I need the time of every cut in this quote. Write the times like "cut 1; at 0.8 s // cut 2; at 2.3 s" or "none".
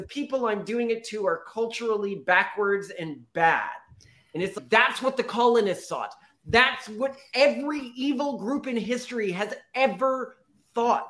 none

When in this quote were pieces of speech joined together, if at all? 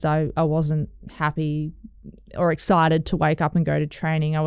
none

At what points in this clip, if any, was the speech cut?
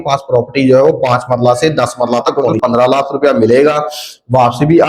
cut 1; at 2.4 s

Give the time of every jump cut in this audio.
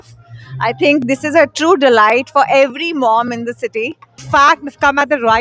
cut 1; at 4.2 s

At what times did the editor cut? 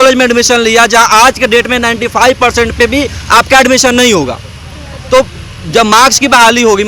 none

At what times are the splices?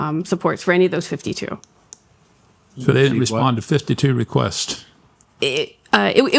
none

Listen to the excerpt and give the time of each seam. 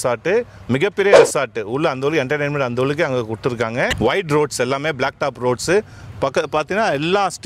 cut 1; at 3.9 s

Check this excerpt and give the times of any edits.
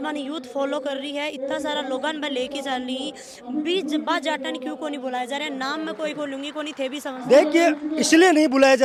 none

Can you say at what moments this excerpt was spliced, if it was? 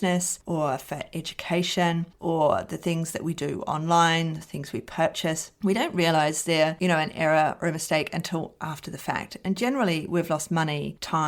none

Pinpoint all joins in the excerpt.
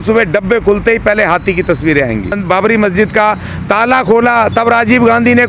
cut 1; at 2.4 s

